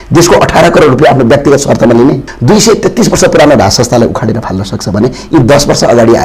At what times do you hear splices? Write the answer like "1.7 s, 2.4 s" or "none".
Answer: 2.3 s